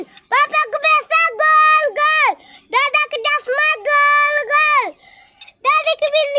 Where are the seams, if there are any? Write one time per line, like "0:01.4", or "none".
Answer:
none